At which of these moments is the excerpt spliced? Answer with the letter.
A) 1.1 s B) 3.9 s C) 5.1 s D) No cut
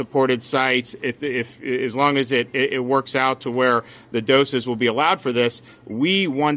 D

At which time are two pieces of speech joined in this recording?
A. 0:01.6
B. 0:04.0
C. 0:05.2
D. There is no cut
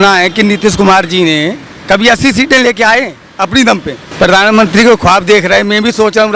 B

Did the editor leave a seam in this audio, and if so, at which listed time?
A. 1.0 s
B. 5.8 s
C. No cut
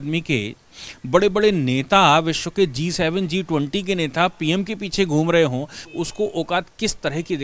B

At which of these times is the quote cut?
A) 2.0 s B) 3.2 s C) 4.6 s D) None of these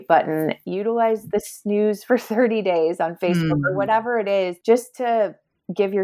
C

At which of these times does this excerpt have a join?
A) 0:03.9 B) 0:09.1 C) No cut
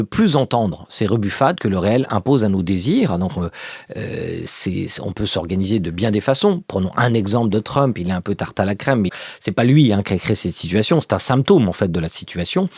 B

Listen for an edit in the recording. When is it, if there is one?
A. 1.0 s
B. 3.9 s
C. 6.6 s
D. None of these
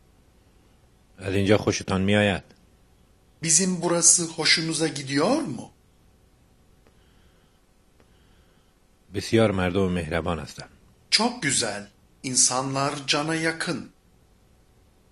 A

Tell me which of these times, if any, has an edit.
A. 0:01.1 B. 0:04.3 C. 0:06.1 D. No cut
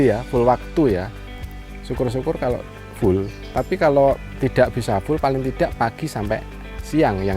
B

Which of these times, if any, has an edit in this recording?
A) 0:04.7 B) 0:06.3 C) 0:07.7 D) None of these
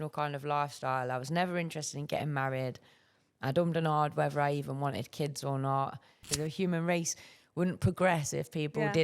B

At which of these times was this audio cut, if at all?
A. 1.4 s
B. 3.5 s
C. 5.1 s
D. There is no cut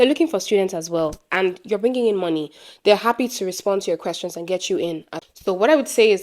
C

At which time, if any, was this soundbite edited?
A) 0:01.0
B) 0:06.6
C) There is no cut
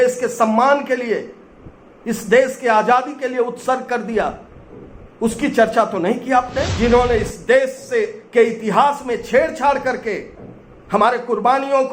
B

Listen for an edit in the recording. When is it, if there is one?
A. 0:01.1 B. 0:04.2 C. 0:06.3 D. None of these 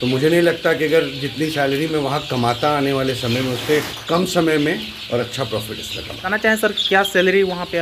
C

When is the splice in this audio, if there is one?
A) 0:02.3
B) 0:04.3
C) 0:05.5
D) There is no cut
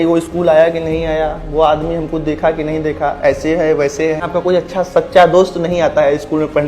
B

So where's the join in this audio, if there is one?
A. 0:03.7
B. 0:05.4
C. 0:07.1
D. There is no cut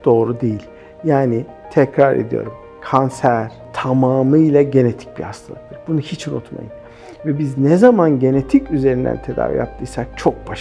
A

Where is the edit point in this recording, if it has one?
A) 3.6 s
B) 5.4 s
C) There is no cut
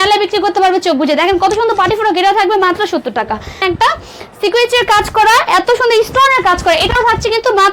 A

